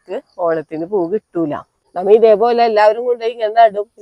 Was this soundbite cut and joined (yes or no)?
yes